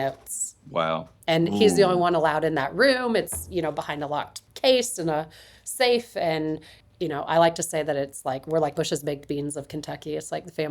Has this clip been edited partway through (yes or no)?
yes